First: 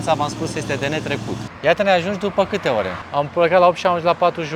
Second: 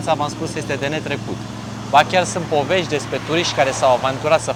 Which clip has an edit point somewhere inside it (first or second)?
first